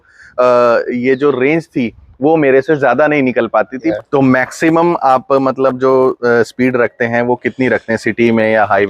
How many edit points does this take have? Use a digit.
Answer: 1